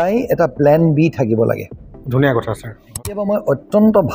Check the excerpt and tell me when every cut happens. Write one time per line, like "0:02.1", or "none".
0:03.0